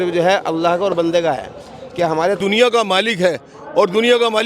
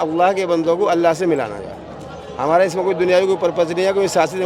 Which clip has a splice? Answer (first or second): first